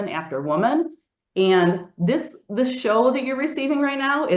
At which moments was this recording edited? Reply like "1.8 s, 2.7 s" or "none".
1.0 s